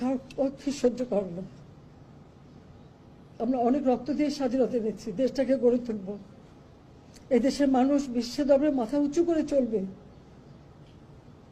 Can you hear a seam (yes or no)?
no